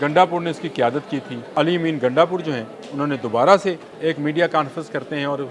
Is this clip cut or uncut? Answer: cut